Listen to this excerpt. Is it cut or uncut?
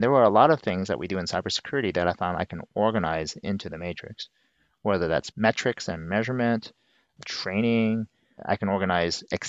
uncut